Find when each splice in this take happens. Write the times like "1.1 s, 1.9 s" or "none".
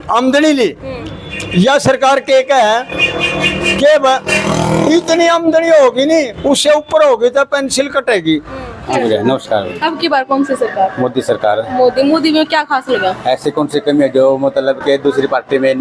8.8 s